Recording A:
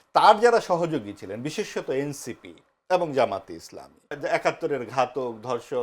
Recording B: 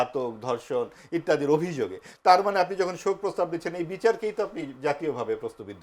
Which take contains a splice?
A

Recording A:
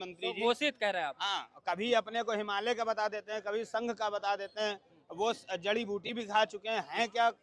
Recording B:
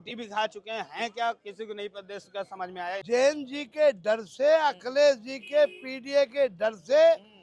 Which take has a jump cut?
B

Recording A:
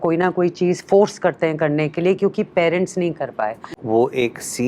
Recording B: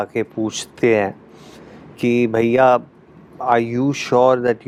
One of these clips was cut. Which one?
A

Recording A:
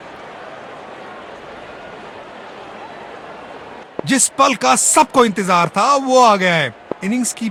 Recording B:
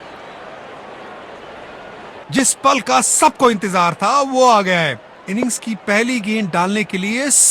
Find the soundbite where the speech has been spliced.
B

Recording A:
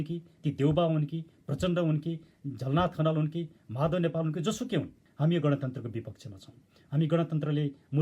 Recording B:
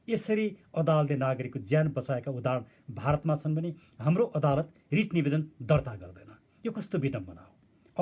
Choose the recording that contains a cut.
A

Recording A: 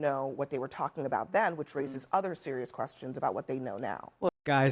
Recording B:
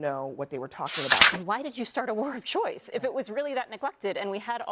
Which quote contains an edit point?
B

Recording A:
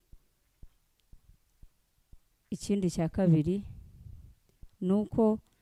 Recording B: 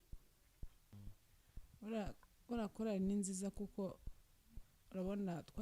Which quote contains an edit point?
B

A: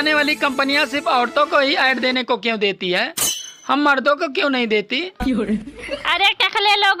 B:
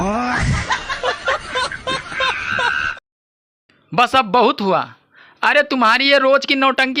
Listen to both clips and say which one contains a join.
B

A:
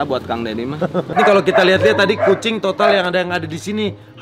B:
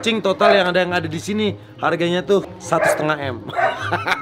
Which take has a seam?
A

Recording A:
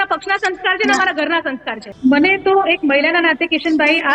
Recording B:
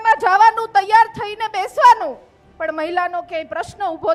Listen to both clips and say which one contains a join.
A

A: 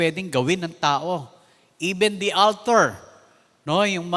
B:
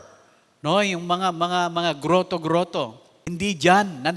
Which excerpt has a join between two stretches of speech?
B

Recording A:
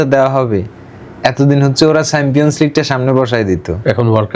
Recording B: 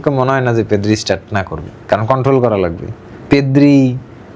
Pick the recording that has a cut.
B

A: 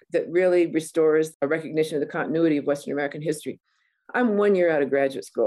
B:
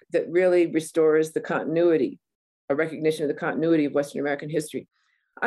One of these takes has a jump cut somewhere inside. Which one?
A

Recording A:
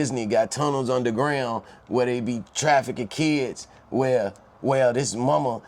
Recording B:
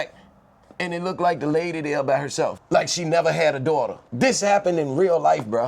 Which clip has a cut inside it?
B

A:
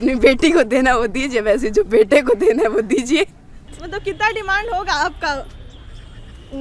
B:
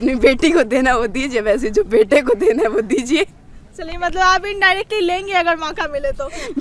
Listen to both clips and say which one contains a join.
A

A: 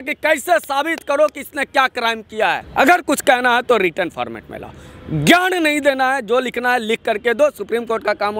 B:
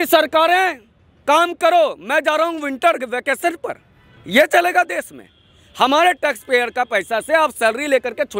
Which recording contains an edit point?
A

